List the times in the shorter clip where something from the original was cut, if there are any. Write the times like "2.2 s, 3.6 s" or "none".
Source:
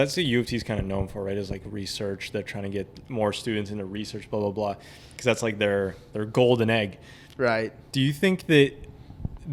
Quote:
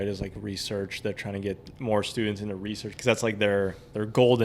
2.9 s